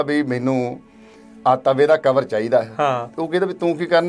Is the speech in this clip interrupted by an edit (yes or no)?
no